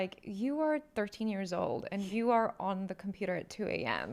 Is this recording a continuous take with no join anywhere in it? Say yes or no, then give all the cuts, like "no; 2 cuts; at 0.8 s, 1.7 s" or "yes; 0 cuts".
yes; 0 cuts